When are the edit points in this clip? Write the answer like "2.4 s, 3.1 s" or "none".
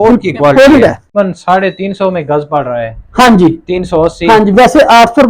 1.1 s